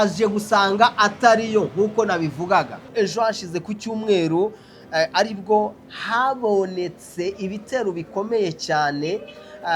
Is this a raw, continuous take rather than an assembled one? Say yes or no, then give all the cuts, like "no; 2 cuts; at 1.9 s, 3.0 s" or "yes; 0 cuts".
no; 1 cut; at 2.9 s